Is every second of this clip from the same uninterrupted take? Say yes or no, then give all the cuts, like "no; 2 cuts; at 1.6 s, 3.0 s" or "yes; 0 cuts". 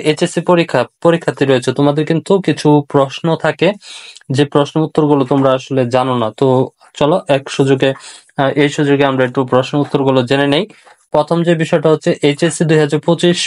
yes; 0 cuts